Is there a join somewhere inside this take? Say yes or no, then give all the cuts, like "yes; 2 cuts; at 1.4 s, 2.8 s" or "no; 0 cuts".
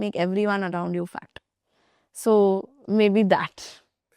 no; 0 cuts